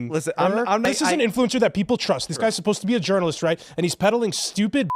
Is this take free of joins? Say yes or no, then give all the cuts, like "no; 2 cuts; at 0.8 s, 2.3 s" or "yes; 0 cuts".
no; 2 cuts; at 0.8 s, 3.9 s